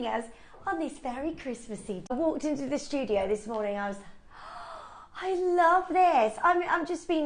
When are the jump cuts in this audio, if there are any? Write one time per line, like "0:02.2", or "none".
0:02.1